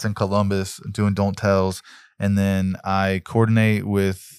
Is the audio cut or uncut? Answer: uncut